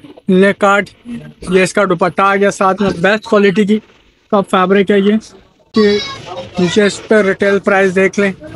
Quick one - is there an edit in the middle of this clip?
yes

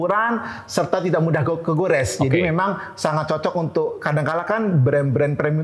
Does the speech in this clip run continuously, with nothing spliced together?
yes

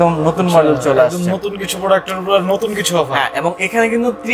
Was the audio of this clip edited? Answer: no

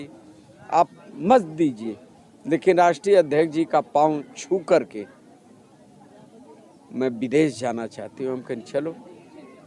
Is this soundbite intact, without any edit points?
yes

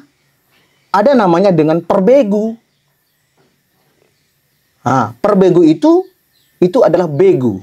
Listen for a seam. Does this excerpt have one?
no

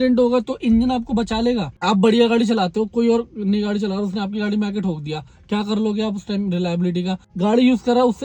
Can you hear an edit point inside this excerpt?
yes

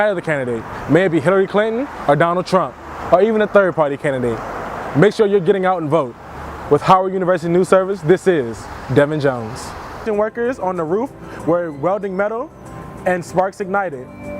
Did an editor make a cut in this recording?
yes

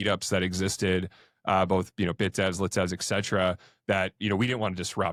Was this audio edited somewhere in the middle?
no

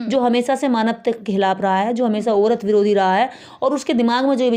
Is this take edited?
no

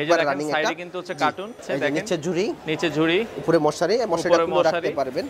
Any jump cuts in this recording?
yes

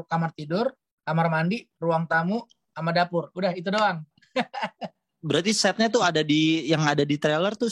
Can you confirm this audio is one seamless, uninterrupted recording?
yes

